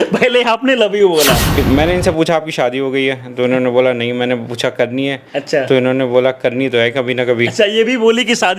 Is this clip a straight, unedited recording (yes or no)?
no